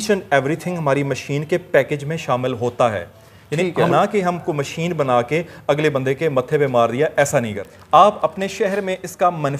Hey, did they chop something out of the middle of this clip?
yes; 2 cuts; at 3.9 s, 7.7 s

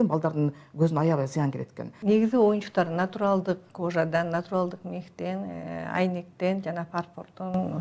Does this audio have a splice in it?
yes; 1 cut; at 1.9 s

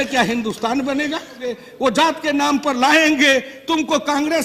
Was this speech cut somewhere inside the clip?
yes; 1 cut; at 1.6 s

